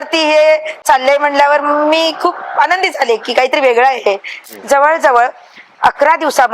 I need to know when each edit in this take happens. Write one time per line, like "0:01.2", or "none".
0:04.3